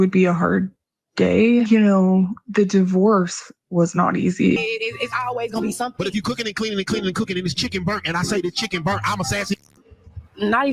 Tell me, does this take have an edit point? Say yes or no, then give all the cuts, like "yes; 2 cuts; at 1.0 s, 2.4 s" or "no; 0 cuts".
yes; 1 cut; at 4.6 s